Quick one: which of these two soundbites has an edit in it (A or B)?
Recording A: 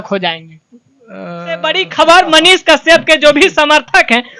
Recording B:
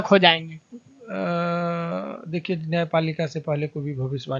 A